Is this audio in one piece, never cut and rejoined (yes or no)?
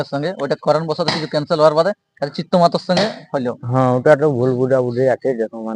yes